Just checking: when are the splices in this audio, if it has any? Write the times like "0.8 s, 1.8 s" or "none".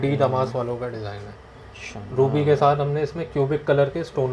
none